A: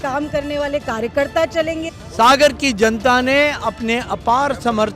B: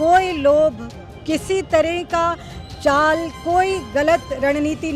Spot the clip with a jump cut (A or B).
A